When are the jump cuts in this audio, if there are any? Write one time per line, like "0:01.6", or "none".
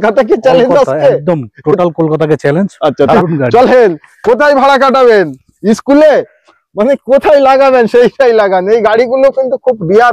0:03.1